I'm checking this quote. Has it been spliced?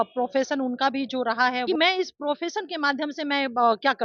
yes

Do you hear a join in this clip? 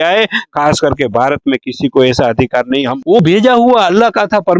yes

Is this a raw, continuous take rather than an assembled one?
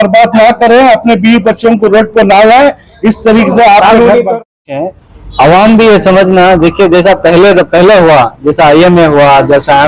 no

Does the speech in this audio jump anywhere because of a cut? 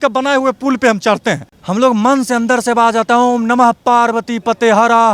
no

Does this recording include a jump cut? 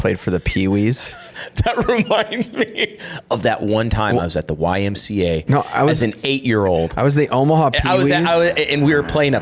no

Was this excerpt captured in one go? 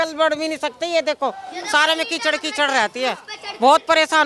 yes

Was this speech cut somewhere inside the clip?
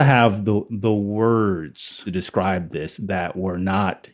yes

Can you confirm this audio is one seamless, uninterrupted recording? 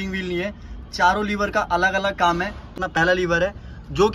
no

